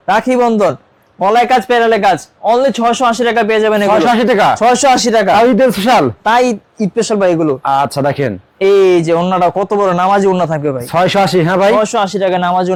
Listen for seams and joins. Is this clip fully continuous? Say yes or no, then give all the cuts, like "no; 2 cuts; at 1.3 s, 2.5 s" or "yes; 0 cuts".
yes; 0 cuts